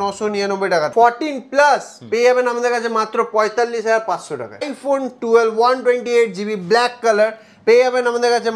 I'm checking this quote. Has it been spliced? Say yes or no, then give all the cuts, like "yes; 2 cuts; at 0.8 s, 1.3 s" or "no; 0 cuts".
yes; 2 cuts; at 0.9 s, 4.6 s